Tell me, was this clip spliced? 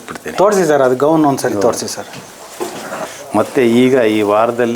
yes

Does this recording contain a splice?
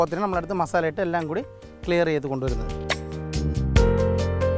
yes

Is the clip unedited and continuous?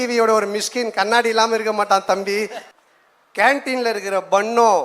no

